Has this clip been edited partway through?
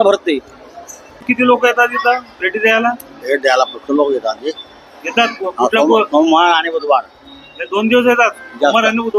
yes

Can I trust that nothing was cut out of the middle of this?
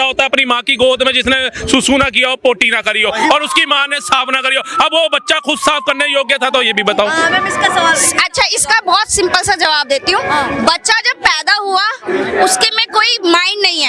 yes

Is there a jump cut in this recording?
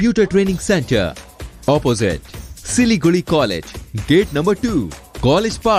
no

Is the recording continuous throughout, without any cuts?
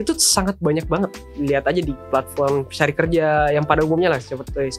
no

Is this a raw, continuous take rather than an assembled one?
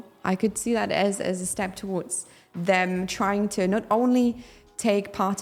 yes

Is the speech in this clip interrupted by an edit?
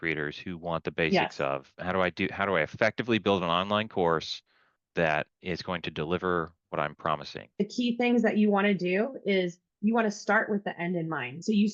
no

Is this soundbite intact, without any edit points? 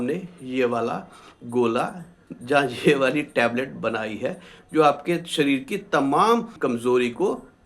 no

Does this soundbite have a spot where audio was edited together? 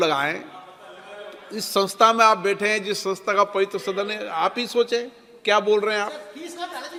no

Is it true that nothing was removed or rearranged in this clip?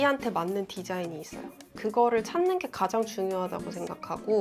no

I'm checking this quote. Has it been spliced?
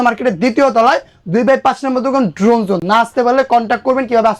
no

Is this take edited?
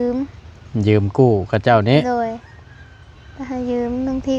no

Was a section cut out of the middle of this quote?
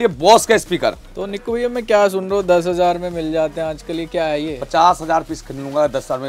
no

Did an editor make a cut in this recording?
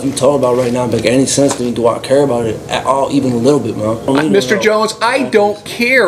yes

